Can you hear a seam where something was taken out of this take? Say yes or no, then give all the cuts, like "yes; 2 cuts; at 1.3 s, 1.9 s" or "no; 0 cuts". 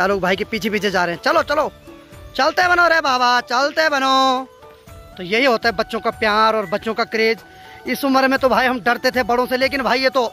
no; 0 cuts